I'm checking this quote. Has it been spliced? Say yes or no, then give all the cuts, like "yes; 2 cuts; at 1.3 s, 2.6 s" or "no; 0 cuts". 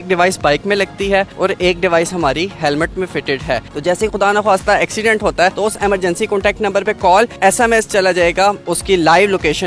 yes; 4 cuts; at 3.6 s, 5.6 s, 7.3 s, 8.6 s